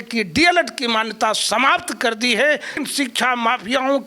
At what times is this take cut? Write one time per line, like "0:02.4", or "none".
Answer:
0:02.8